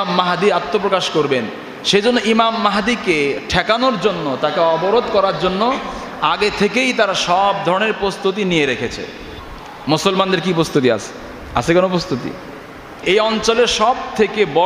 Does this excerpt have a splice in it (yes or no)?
yes